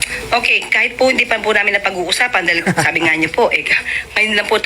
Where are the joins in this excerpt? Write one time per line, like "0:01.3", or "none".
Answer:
0:03.2